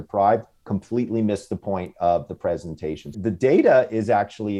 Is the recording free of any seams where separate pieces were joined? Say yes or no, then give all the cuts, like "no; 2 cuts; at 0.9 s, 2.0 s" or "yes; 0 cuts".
no; 1 cut; at 3.2 s